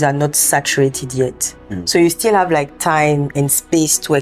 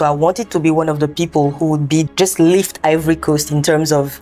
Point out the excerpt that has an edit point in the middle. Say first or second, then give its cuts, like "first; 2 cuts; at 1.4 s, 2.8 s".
second; 1 cut; at 2.1 s